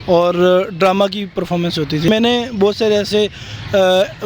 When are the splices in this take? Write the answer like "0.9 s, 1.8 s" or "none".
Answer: 2.1 s